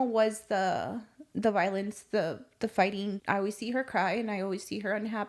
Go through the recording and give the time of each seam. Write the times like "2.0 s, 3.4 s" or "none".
3.2 s